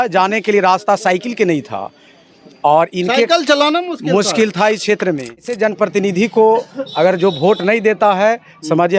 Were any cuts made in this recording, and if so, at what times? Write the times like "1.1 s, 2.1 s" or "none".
5.5 s